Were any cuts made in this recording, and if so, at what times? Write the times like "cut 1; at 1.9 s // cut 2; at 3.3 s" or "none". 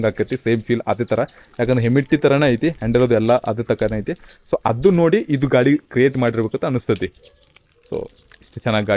none